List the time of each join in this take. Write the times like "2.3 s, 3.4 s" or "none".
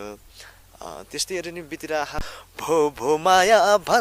2.4 s